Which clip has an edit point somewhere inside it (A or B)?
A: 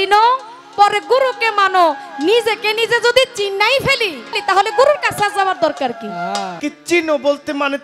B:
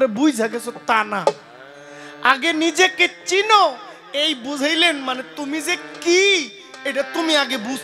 A